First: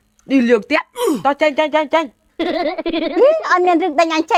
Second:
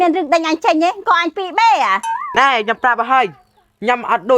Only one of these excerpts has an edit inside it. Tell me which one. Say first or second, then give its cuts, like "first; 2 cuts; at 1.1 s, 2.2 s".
second; 1 cut; at 2.2 s